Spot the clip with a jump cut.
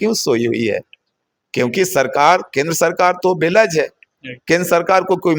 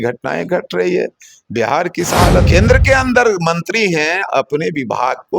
second; 1 cut; at 2.5 s

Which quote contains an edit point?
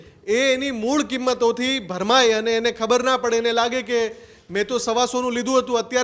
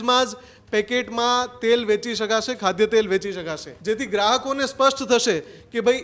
second; 1 cut; at 3.7 s

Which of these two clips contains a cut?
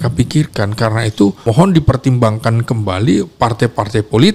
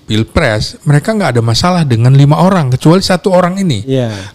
first; 1 cut; at 1.4 s

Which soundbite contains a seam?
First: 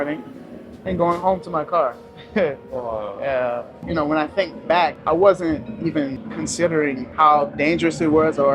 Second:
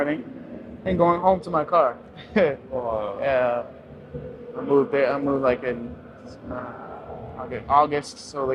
first; 4 cuts; at 3.8 s, 5.0 s, 6.2 s, 7.1 s

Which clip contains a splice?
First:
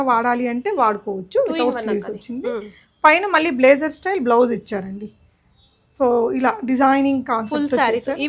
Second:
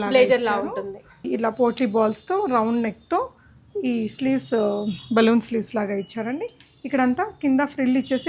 second; 1 cut; at 1.2 s

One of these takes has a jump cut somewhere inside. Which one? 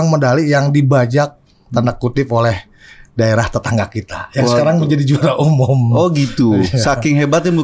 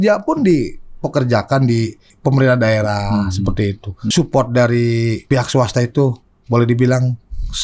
second; 3 cuts; at 2.1 s, 3.9 s, 5.2 s

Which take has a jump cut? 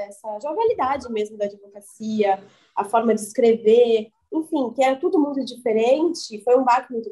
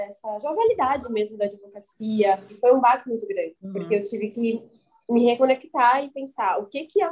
second; 2 cuts; at 2.5 s, 3.6 s

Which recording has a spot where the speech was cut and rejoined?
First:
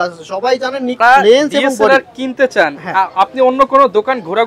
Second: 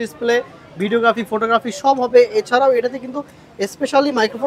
first; 1 cut; at 1.0 s

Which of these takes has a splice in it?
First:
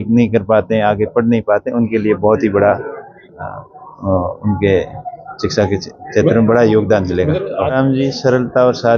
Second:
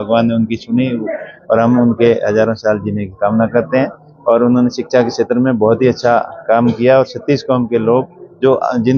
first; 1 cut; at 7.7 s

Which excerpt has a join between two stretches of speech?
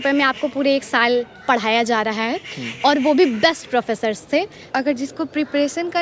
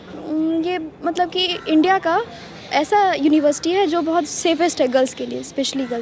first; 1 cut; at 4.6 s

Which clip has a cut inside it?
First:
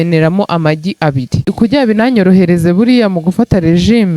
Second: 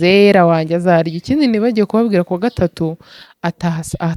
first; 1 cut; at 1.5 s

